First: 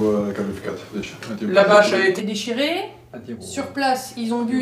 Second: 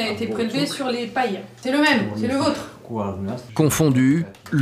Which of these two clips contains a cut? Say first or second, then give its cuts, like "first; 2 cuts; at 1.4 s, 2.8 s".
second; 2 cuts; at 1.5 s, 3.4 s